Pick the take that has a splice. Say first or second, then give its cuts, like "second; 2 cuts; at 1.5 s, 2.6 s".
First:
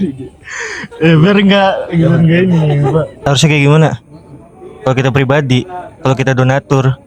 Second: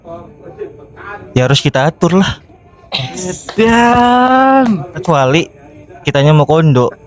first; 1 cut; at 3.1 s